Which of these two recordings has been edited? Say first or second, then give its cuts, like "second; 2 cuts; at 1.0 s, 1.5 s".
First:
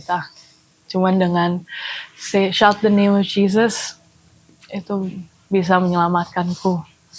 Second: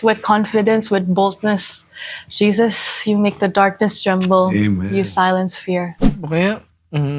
second; 1 cut; at 6.0 s